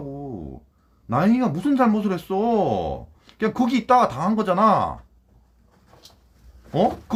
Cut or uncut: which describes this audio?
uncut